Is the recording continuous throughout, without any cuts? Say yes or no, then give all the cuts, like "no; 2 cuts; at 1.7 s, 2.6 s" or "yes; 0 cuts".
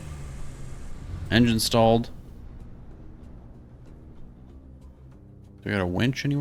yes; 0 cuts